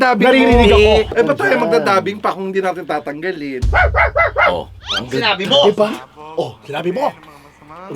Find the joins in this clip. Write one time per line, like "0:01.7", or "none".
0:01.1